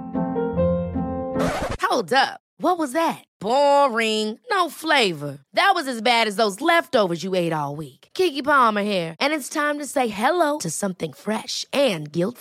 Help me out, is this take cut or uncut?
uncut